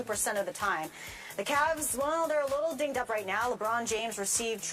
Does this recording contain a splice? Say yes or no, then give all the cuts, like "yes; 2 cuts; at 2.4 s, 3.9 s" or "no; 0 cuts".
yes; 1 cut; at 1.0 s